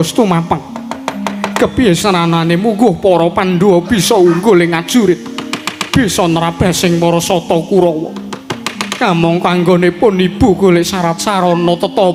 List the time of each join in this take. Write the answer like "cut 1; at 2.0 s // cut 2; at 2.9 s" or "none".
none